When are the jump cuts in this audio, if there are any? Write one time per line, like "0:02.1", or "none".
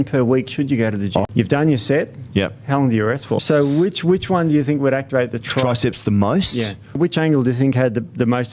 0:01.2
0:03.4
0:07.0